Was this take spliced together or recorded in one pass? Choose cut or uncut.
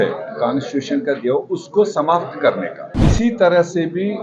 cut